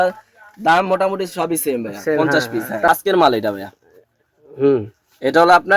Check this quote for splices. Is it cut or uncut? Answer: cut